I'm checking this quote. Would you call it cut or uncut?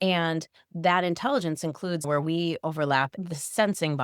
cut